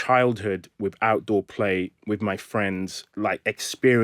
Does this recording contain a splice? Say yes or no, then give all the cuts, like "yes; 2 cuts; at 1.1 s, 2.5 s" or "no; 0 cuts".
yes; 1 cut; at 3.0 s